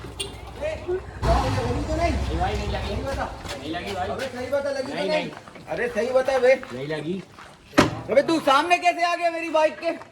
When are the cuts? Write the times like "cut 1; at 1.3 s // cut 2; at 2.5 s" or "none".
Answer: cut 1; at 1.2 s